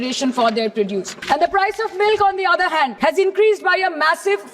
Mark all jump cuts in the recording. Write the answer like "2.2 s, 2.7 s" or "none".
1.1 s, 2.9 s